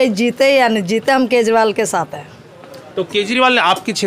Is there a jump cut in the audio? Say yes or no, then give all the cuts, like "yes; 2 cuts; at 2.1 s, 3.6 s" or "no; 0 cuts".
no; 0 cuts